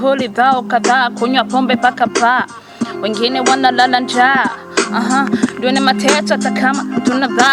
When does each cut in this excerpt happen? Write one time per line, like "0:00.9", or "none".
none